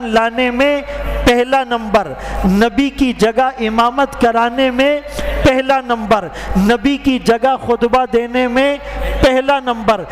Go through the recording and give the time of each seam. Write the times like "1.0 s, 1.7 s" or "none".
none